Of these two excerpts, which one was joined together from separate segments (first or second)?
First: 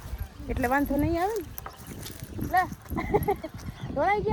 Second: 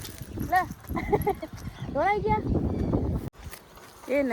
second